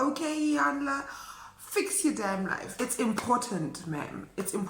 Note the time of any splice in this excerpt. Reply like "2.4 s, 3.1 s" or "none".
2.7 s